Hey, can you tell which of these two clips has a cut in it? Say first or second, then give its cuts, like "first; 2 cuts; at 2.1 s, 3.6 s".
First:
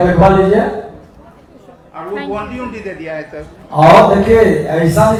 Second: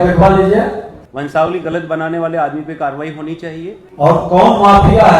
second; 2 cuts; at 1.0 s, 3.8 s